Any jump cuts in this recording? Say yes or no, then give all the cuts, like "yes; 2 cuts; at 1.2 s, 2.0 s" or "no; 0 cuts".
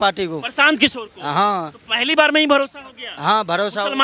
no; 0 cuts